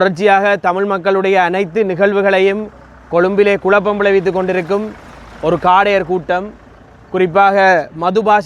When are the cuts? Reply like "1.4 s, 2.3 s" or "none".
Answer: none

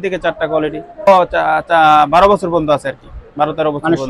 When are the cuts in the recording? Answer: 1.1 s

